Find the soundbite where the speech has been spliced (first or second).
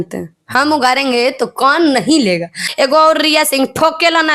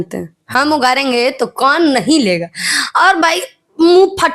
first